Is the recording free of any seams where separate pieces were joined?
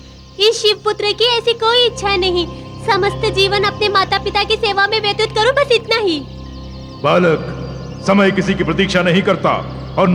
yes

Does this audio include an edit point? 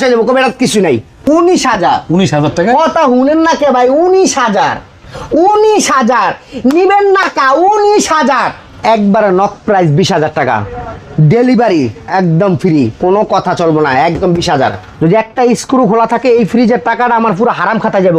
yes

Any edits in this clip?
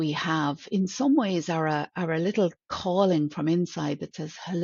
no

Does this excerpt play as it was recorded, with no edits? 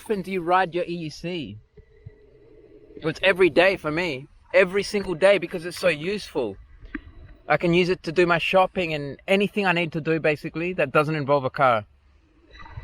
yes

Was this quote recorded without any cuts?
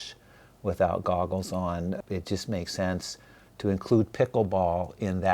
no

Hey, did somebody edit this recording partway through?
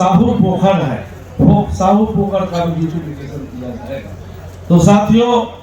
no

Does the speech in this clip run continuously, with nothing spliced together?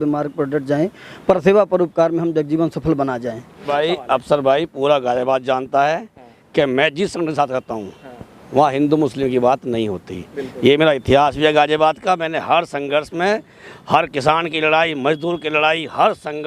no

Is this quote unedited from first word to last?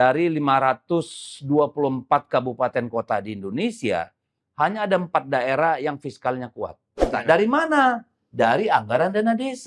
no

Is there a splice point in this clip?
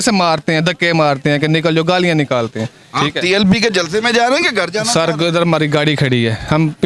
no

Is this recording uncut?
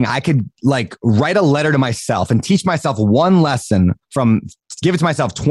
yes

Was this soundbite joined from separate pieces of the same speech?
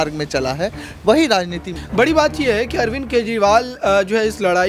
yes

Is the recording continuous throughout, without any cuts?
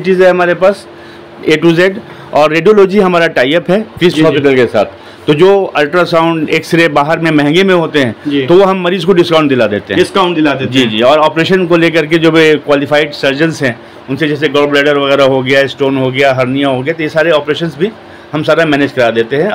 yes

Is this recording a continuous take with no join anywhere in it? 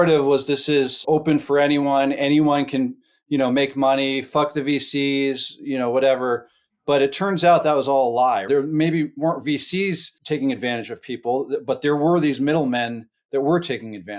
no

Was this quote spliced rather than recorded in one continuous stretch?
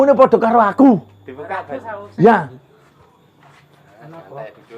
yes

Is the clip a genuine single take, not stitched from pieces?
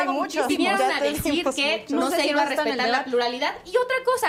yes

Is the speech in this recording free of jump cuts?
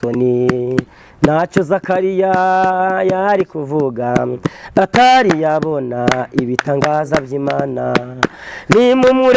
yes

